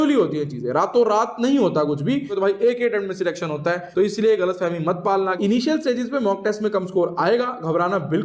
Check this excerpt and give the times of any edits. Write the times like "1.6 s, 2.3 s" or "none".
2.3 s, 5.4 s